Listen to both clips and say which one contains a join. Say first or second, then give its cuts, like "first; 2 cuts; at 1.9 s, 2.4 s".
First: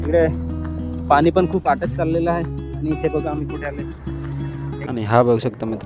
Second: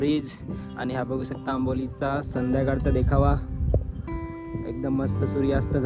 first; 1 cut; at 4.9 s